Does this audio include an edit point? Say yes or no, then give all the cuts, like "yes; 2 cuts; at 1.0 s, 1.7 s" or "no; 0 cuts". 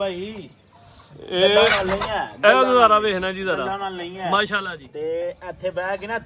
no; 0 cuts